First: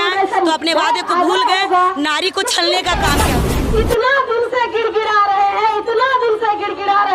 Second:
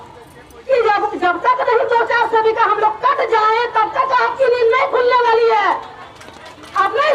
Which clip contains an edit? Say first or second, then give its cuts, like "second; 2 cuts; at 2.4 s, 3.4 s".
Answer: first; 1 cut; at 3.3 s